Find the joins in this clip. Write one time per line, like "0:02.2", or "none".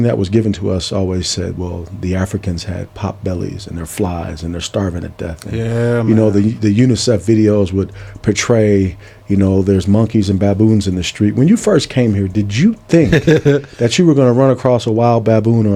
none